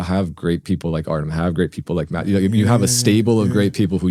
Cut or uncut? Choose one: uncut